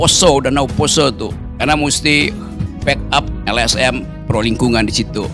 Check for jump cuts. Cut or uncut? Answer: cut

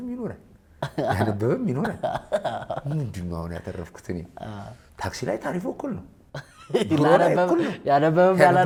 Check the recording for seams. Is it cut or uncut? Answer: uncut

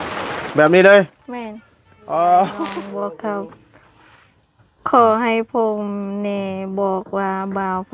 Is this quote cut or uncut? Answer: cut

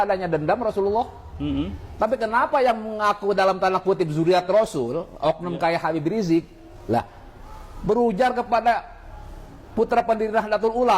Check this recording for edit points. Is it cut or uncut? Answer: uncut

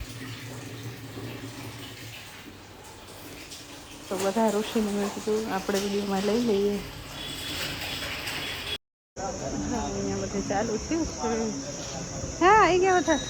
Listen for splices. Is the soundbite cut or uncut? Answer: uncut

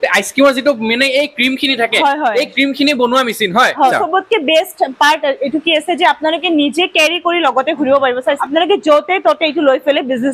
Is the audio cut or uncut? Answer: cut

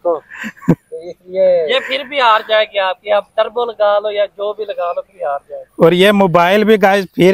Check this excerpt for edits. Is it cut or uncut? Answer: uncut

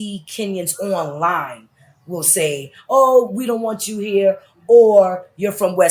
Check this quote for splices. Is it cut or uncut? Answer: uncut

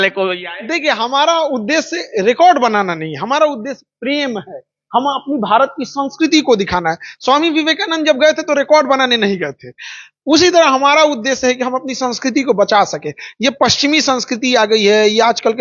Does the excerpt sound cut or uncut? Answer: uncut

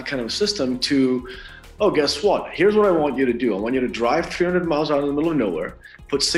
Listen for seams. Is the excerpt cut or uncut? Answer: uncut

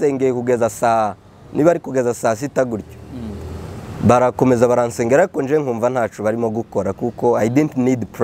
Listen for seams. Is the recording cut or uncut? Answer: uncut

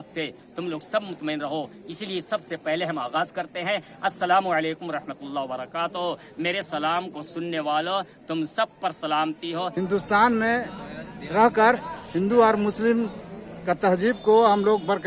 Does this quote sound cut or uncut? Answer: cut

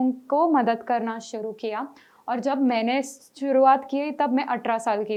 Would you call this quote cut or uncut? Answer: uncut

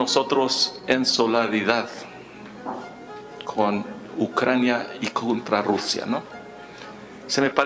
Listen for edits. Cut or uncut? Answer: uncut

